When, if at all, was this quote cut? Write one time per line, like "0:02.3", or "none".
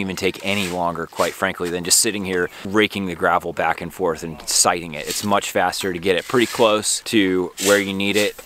0:02.6
0:07.0